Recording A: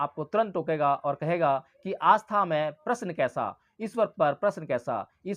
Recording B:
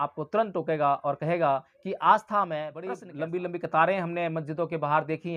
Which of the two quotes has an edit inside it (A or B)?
B